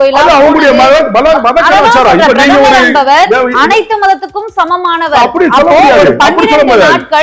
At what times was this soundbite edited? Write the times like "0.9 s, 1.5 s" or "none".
none